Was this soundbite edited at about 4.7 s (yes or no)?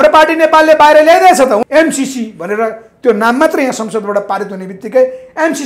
no